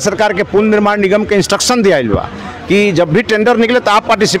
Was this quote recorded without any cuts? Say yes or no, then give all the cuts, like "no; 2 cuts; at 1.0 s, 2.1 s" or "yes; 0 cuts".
yes; 0 cuts